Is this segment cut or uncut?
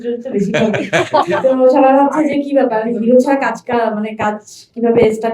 cut